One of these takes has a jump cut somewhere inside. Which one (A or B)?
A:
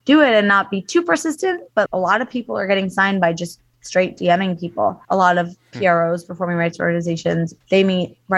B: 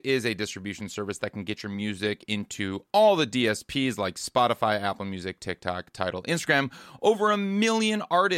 A